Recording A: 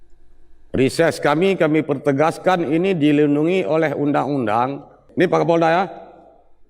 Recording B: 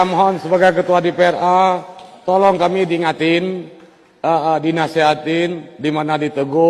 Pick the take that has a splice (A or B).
A